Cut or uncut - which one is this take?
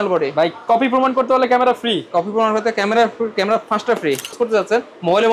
cut